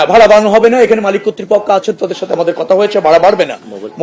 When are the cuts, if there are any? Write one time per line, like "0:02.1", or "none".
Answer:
none

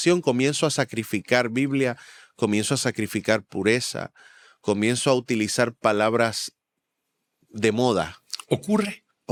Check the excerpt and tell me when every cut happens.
none

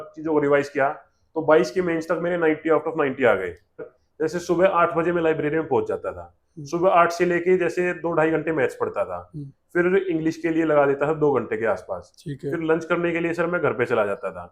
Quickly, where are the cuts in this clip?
0:03.9

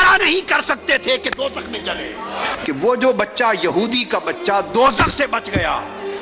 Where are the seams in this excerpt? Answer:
0:02.5

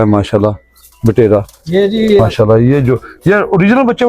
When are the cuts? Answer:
0:02.3

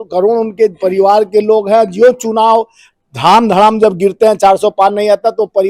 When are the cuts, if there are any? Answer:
none

